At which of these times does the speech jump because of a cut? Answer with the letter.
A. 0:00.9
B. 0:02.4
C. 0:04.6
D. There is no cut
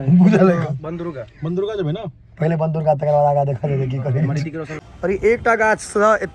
C